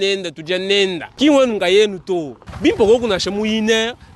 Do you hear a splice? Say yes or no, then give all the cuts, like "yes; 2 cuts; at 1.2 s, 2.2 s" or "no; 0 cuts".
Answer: yes; 2 cuts; at 1.1 s, 2.3 s